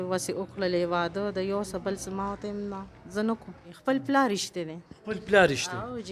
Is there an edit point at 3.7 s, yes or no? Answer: yes